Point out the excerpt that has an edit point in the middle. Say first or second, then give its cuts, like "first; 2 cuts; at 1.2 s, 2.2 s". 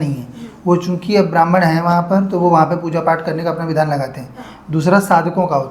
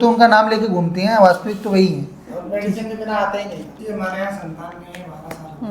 second; 1 cut; at 3.8 s